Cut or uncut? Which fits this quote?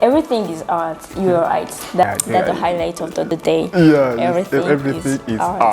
cut